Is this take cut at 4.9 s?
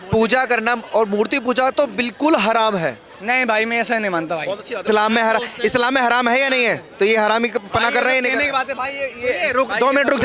yes; 1 cut; at 4.9 s

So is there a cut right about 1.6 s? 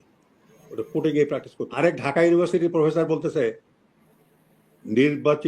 yes; 1 cut; at 1.6 s

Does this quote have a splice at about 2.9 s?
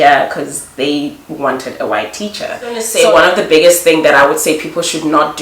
yes; 1 cut; at 2.9 s

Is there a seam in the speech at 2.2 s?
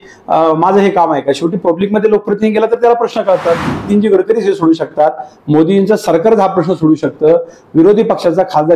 no; 1 cut; at 3.9 s

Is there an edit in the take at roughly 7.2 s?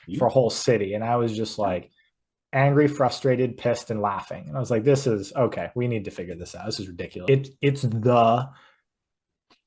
yes; 1 cut; at 7.2 s

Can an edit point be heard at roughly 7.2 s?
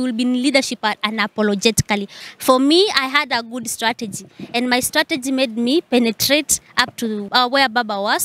yes; 2 cuts; at 2.1 s, 7.2 s

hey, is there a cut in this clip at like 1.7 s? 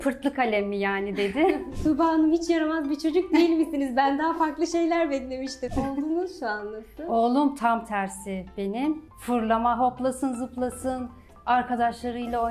yes; 2 cuts; at 1.7 s, 5.6 s

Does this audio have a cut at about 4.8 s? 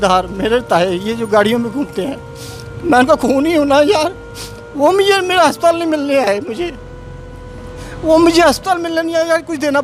no; 0 cuts

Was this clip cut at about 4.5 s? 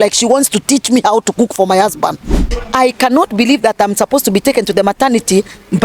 no; 1 cut; at 2.6 s

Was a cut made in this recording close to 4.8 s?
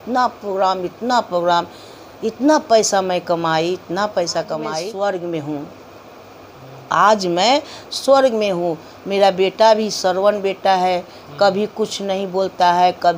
yes; 1 cut; at 4.8 s

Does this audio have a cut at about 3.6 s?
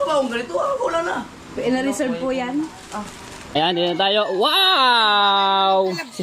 yes; 1 cut; at 3.6 s

